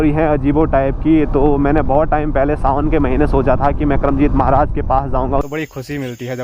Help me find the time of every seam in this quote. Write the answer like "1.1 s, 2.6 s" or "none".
5.4 s